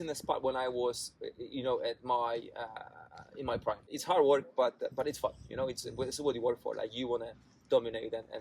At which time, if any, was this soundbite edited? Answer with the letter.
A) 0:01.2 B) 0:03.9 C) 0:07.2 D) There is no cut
B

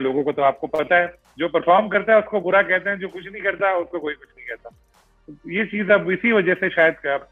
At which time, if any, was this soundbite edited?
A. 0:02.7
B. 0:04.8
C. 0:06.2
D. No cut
D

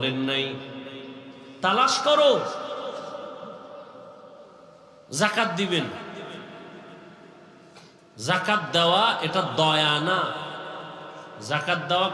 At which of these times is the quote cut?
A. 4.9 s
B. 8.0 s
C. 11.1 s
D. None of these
A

